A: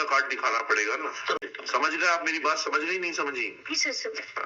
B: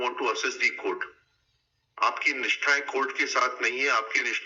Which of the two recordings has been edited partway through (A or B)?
A